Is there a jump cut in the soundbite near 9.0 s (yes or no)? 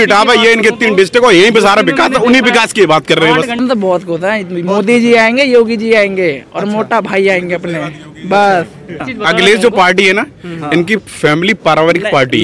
yes